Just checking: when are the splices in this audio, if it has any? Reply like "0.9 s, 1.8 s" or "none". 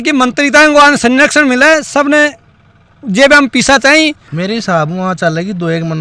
4.2 s